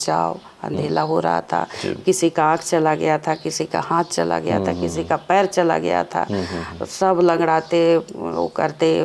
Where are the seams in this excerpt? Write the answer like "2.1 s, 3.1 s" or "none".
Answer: none